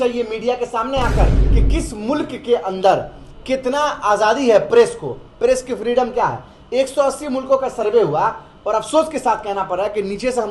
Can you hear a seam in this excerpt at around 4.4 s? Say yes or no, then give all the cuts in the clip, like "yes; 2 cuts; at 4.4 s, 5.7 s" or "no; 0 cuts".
no; 1 cut; at 1.4 s